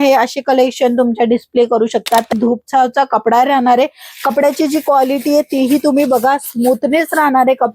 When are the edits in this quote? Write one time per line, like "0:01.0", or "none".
0:02.3